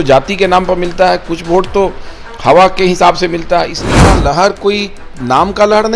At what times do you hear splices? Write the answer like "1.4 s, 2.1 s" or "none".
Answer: 3.8 s